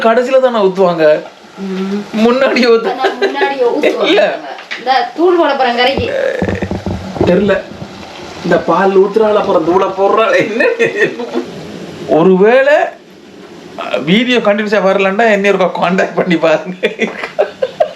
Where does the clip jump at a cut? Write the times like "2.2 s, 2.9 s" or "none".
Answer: 11.5 s